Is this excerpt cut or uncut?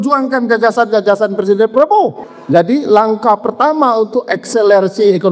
cut